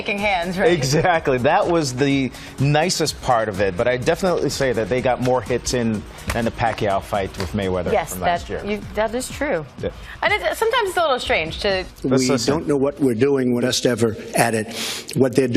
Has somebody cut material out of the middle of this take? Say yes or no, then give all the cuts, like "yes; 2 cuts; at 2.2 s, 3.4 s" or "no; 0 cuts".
no; 0 cuts